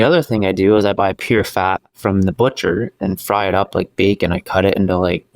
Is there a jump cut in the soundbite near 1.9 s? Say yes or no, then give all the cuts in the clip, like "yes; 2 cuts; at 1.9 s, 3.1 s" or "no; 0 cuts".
yes; 1 cut; at 1.9 s